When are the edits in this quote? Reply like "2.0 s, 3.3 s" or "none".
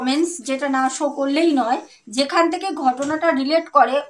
2.0 s